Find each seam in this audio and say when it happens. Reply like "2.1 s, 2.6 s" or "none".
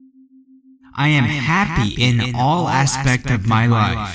0.9 s